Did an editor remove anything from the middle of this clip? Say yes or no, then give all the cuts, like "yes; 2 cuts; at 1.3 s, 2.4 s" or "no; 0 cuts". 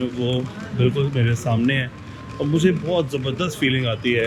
no; 0 cuts